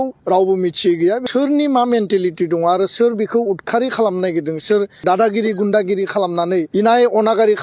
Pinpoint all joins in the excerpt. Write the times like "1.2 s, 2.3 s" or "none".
1.2 s, 5.0 s, 6.7 s